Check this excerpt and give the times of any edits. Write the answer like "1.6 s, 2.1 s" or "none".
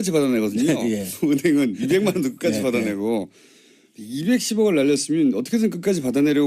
2.7 s

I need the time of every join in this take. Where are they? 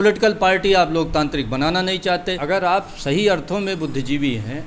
2.3 s

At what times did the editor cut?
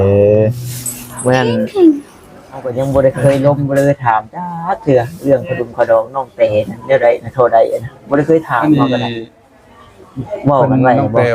2.7 s

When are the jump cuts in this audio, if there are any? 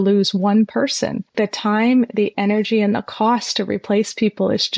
1.2 s

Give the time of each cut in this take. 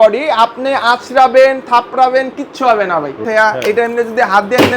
3.2 s

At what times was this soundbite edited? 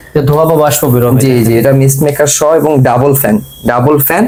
none

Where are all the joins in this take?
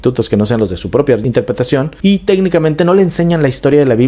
1.6 s

